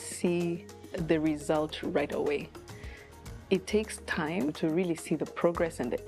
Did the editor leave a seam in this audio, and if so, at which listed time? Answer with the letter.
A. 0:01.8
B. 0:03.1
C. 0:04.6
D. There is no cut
C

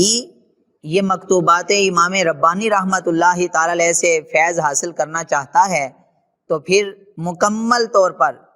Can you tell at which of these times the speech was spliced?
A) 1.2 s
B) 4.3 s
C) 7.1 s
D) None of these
C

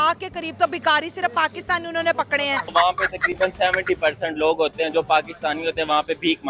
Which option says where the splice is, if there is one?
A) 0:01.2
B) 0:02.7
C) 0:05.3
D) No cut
B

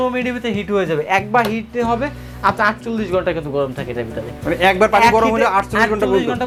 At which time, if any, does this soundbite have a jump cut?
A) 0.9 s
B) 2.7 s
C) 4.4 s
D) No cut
D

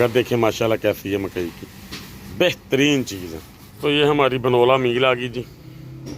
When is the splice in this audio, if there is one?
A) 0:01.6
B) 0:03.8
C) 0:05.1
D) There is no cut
B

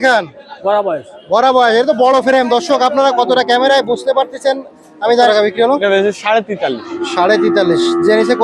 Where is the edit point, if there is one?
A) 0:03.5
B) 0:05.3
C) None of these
B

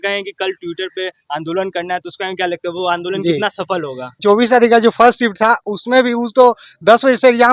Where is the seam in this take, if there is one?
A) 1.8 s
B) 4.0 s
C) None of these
B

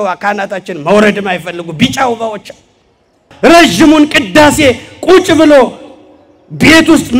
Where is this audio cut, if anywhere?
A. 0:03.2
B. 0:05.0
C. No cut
A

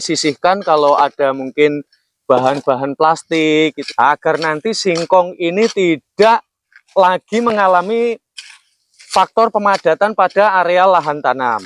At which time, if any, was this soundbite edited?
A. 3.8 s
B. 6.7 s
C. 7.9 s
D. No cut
A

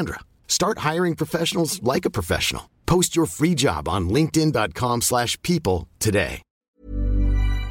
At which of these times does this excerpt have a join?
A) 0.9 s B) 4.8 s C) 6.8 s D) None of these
C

